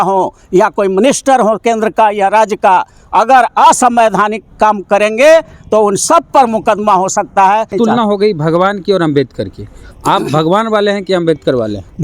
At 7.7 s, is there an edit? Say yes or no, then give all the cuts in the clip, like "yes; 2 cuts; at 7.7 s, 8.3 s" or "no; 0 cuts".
yes; 1 cut; at 7.7 s